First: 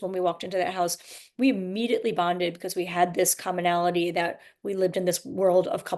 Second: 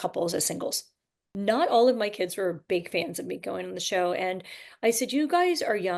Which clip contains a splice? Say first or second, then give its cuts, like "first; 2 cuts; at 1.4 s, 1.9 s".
second; 1 cut; at 1.0 s